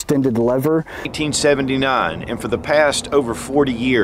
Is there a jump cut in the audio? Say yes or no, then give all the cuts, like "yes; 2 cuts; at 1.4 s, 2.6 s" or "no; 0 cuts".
yes; 1 cut; at 0.9 s